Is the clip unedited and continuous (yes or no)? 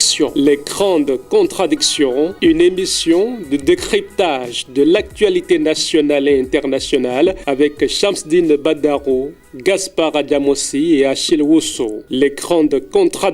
no